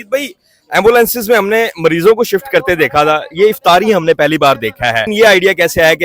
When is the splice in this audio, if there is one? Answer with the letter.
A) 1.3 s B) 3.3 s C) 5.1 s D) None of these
C